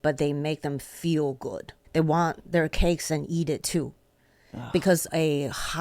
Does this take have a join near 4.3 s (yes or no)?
no